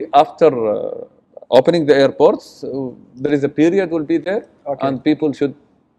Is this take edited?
no; 0 cuts

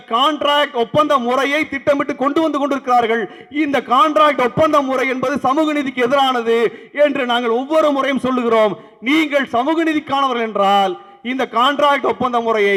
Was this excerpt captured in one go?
yes; 0 cuts

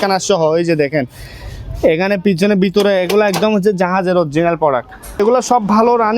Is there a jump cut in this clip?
yes; 1 cut; at 5.2 s

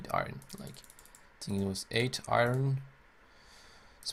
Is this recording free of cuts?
yes; 0 cuts

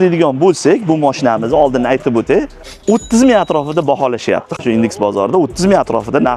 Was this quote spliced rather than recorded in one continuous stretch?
no; 0 cuts

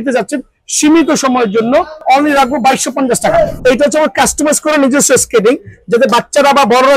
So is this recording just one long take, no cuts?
no; 2 cuts; at 2.0 s, 3.5 s

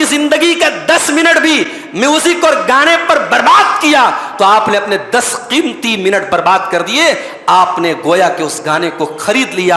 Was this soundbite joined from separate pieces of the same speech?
no; 0 cuts

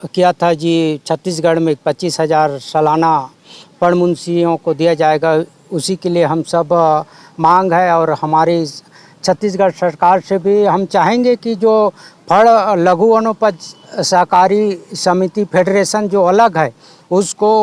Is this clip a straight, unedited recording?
yes; 0 cuts

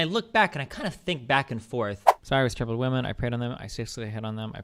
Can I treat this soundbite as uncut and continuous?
no; 1 cut; at 2.1 s

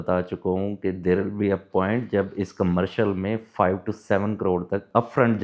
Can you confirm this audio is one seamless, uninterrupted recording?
yes; 0 cuts

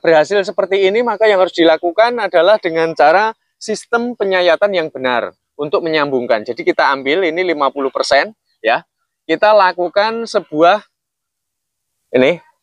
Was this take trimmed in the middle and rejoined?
no; 0 cuts

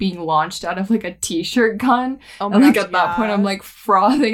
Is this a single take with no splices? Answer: yes; 0 cuts

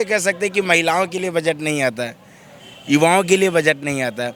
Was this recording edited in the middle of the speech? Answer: no; 0 cuts

